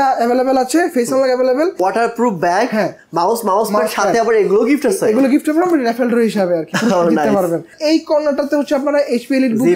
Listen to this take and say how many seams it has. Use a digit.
2